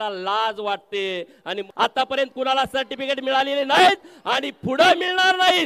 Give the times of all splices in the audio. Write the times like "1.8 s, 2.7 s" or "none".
1.7 s